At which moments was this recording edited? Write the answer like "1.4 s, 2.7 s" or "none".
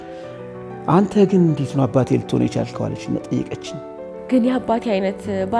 4.1 s

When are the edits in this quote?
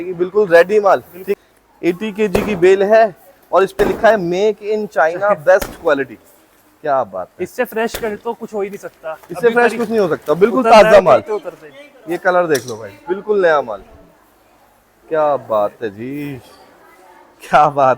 1.2 s

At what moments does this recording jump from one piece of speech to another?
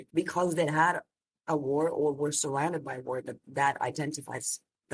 none

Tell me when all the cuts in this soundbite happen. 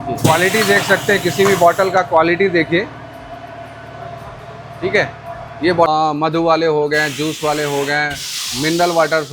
5.9 s

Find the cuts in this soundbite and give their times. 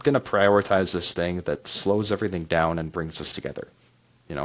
none

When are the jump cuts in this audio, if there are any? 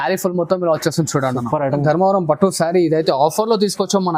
1.8 s

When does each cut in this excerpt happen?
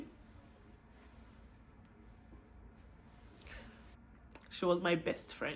3.9 s

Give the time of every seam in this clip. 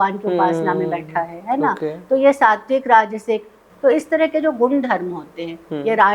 3.6 s

